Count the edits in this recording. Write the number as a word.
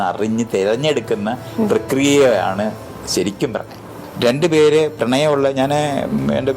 one